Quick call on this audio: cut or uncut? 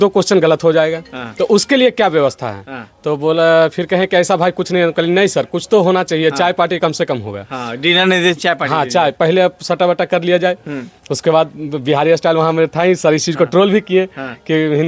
uncut